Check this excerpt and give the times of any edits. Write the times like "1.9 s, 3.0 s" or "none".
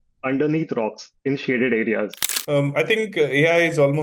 2.3 s